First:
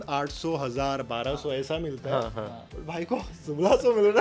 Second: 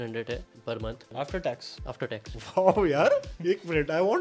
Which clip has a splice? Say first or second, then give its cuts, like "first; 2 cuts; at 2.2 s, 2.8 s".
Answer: second; 3 cuts; at 1.1 s, 2.4 s, 3.3 s